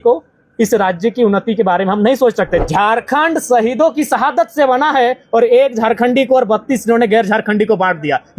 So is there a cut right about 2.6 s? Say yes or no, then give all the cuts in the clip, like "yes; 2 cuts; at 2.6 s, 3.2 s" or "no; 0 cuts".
yes; 1 cut; at 2.6 s